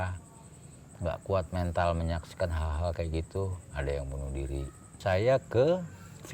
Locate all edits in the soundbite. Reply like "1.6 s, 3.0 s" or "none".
5.0 s